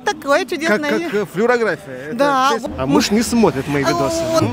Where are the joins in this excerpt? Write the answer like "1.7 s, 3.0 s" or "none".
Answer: 2.6 s